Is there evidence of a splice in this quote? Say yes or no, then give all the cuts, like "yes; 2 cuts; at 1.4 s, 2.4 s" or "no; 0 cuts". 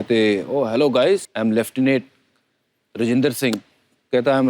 yes; 1 cut; at 1.3 s